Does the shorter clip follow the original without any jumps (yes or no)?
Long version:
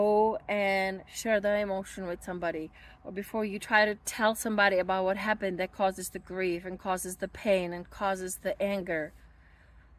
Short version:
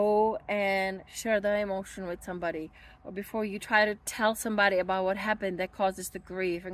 yes